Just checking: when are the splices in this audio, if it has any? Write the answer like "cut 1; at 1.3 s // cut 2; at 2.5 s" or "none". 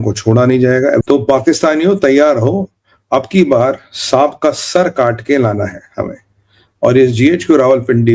cut 1; at 1.0 s